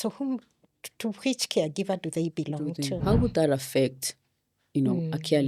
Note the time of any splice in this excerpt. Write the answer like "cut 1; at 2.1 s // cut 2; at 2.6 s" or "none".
cut 1; at 3.0 s

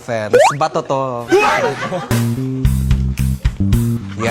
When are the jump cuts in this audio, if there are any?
cut 1; at 2.1 s

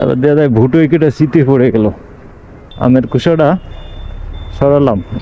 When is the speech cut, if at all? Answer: none

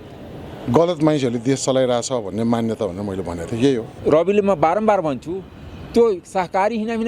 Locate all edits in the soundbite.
cut 1; at 3.9 s

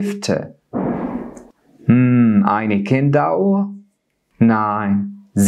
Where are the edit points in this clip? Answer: cut 1; at 1.4 s

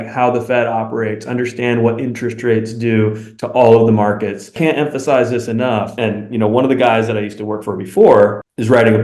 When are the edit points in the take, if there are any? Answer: cut 1; at 4.5 s // cut 2; at 5.9 s

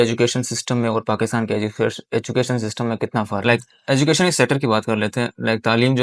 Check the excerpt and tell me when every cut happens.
cut 1; at 3.4 s

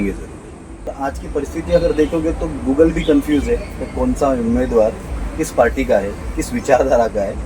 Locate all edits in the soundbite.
cut 1; at 0.9 s

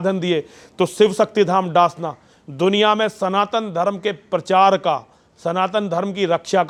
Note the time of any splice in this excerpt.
none

